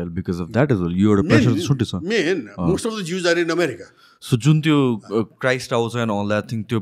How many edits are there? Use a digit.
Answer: 0